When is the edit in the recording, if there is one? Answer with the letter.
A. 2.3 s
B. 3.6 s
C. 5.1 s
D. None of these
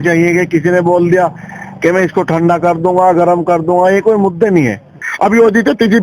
C